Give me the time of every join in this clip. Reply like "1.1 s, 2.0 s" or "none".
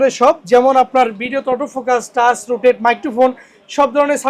none

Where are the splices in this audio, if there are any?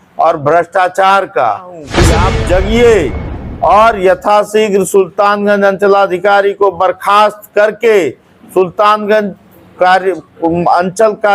2.0 s

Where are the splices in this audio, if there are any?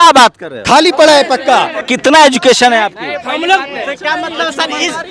1.9 s

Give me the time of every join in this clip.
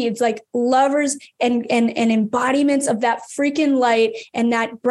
none

